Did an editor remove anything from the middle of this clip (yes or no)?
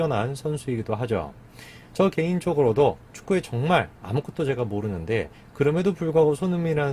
no